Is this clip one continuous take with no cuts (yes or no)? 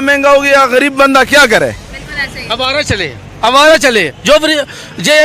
yes